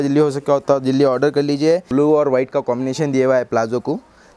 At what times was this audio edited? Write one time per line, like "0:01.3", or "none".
0:01.9